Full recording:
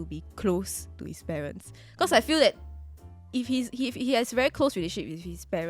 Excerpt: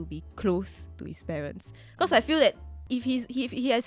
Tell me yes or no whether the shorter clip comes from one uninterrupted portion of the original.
no